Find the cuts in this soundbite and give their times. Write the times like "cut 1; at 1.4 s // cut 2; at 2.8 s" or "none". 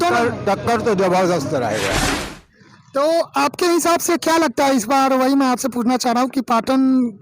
cut 1; at 2.1 s